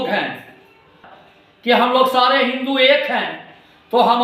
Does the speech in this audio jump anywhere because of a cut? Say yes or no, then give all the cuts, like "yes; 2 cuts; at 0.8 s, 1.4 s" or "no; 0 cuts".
yes; 1 cut; at 1.1 s